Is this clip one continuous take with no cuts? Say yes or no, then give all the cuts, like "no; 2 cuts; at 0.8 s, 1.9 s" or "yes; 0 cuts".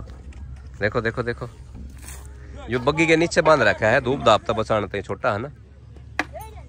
yes; 0 cuts